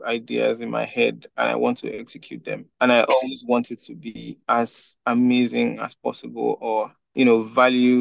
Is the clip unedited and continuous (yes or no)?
no